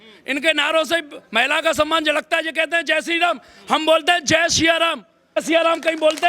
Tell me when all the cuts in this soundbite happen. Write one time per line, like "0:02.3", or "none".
0:05.3